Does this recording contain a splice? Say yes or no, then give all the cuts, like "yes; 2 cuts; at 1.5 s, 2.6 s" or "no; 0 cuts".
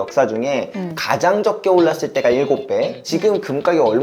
yes; 1 cut; at 3.1 s